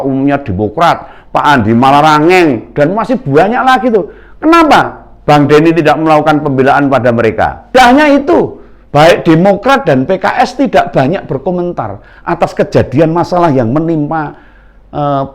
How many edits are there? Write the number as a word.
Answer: one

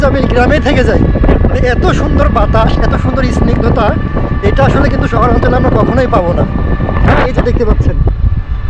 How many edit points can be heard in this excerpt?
zero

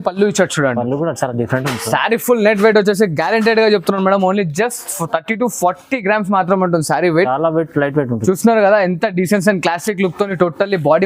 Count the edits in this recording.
zero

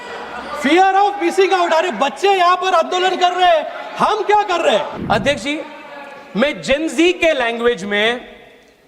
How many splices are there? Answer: one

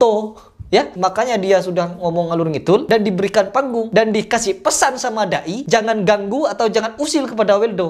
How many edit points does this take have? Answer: two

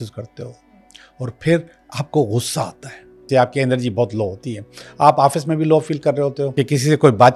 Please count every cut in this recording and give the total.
two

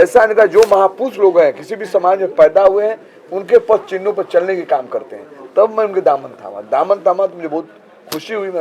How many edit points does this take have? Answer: zero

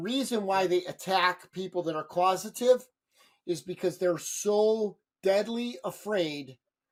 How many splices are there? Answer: zero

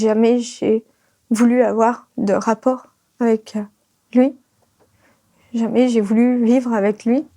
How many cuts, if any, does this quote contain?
one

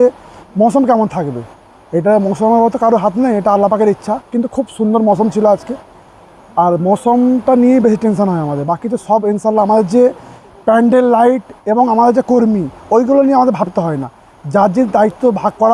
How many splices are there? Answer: zero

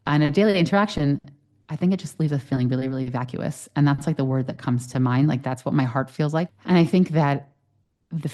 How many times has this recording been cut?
one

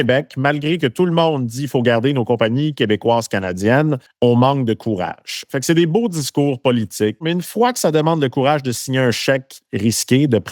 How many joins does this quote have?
three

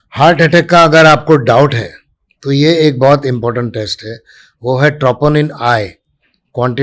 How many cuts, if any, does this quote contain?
zero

